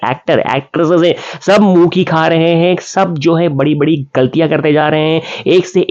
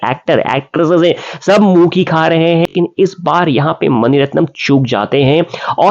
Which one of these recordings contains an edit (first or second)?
second